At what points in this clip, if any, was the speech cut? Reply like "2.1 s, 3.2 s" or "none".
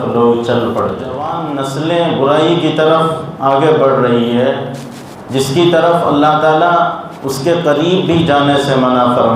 1.4 s